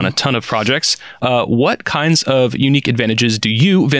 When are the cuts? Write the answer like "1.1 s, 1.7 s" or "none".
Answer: 1.2 s